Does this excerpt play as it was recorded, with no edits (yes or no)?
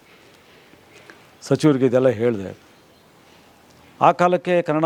yes